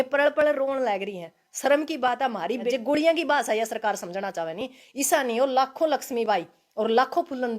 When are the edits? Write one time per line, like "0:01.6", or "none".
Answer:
0:02.7